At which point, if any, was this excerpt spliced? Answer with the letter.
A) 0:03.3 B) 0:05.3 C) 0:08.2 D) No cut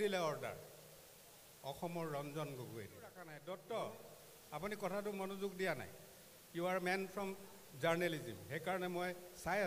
A